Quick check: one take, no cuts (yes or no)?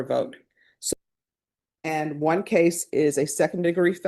no